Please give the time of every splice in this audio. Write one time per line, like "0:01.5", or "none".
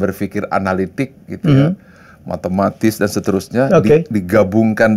none